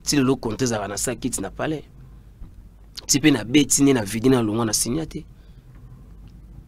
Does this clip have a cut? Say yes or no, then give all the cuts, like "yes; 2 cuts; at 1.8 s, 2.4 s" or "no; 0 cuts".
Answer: no; 0 cuts